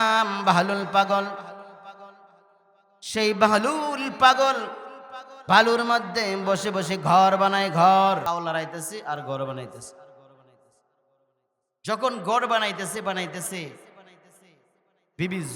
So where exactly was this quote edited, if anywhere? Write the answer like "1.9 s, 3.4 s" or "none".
8.3 s